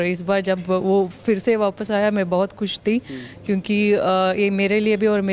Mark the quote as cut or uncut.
uncut